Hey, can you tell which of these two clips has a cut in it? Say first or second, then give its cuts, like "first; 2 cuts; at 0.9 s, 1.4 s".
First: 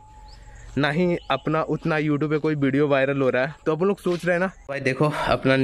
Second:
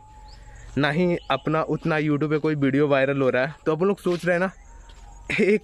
first; 1 cut; at 4.6 s